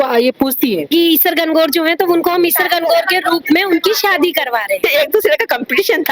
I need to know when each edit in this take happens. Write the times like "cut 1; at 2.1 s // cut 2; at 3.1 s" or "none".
cut 1; at 0.9 s // cut 2; at 4.8 s